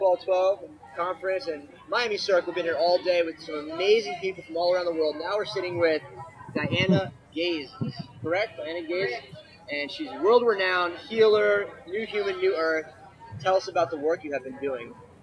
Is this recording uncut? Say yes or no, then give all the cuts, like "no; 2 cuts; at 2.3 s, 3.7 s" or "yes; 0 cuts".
no; 1 cut; at 7.3 s